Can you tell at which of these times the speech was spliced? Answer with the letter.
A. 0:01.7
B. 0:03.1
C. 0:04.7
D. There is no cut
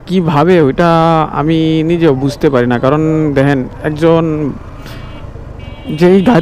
D